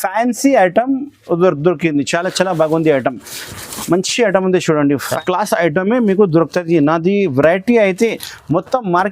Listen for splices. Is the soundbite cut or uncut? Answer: cut